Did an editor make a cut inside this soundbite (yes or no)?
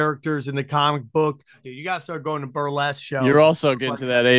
yes